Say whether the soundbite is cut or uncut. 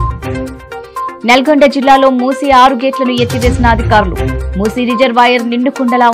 uncut